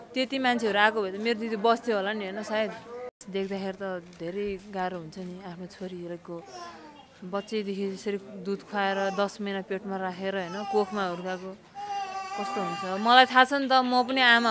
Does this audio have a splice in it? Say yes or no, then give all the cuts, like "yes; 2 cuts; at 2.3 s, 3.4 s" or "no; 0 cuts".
yes; 1 cut; at 3.2 s